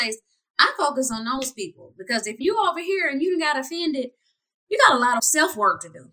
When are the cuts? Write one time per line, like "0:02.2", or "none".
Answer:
0:02.3
0:05.3